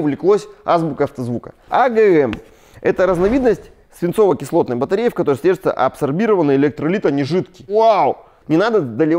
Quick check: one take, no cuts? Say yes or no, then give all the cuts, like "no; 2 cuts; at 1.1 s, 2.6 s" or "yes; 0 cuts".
no; 2 cuts; at 1.5 s, 8.3 s